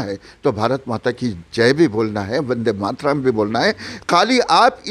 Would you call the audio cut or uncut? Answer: uncut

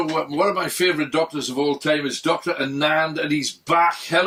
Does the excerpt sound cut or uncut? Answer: uncut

